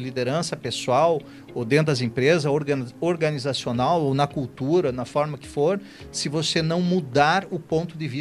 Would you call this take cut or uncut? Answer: uncut